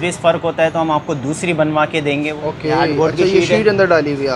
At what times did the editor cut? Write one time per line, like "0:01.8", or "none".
0:02.3